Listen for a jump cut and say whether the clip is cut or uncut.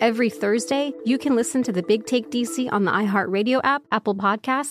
cut